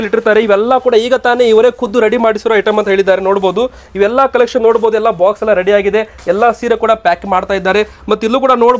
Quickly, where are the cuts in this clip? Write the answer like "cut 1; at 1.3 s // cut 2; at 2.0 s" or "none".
none